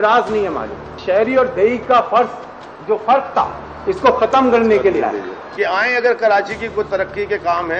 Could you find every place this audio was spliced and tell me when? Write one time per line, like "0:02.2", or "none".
0:00.9